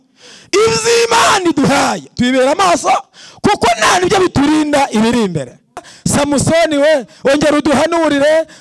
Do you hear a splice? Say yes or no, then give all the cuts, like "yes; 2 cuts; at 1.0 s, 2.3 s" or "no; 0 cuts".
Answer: yes; 1 cut; at 5.9 s